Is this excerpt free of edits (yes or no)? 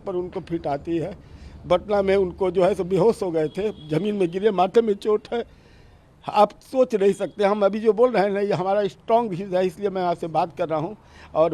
yes